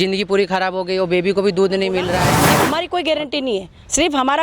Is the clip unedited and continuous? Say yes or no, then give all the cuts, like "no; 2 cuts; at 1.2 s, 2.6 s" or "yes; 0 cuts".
no; 1 cut; at 2.5 s